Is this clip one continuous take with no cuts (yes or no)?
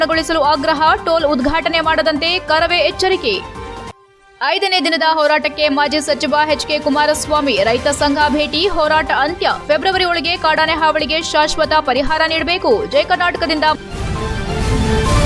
no